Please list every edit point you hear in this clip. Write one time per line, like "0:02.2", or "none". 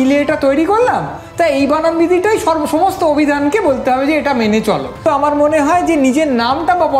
0:05.0